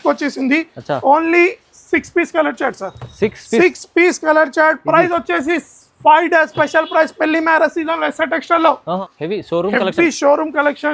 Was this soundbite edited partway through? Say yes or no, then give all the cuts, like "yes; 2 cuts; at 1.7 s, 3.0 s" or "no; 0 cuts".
yes; 1 cut; at 9.1 s